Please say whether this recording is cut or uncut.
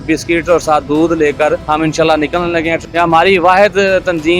cut